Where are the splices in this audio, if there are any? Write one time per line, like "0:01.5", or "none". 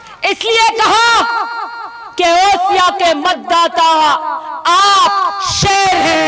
none